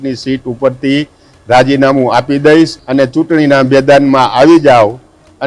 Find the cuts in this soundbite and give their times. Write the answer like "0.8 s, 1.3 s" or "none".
2.8 s